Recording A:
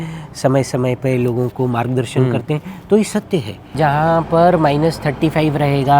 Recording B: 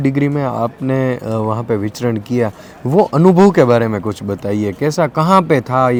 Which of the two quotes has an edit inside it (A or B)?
A